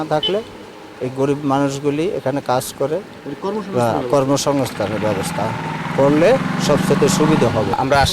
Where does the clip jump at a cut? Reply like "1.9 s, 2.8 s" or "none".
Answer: none

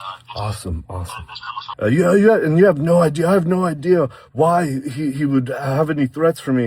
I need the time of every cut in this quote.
1.6 s

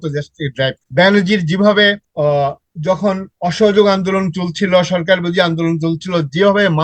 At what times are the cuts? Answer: 0.8 s, 2.1 s

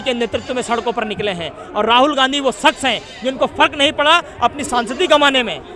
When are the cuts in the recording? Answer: none

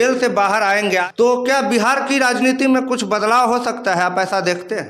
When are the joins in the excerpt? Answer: 1.1 s

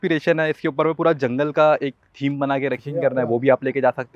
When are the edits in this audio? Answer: 2.8 s

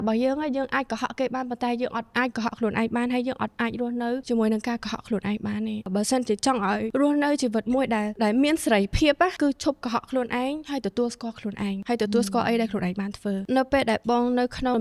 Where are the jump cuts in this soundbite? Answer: none

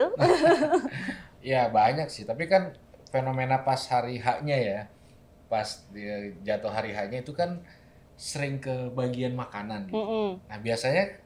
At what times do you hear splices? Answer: none

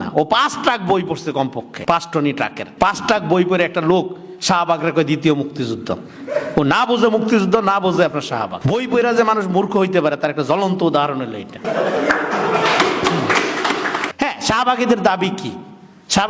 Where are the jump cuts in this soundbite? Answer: 1.7 s, 2.6 s, 8.5 s, 11.6 s, 14.0 s

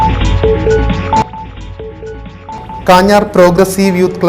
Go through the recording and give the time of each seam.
1.2 s

